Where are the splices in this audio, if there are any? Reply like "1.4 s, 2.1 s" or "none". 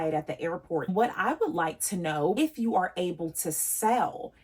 0.9 s, 2.4 s

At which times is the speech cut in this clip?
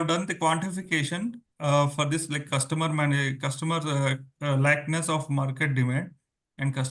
none

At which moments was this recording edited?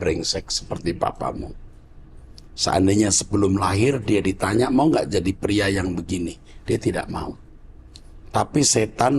none

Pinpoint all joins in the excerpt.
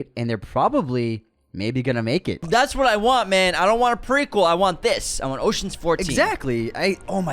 2.4 s

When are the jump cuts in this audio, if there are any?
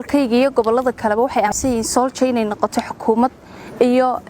1.5 s

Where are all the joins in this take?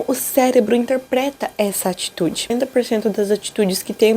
2.5 s

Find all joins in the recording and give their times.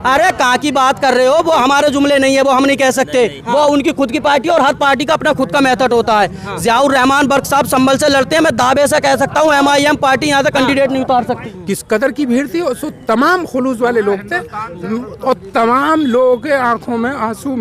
11.5 s

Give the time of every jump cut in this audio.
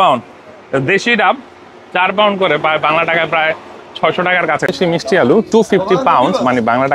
4.7 s

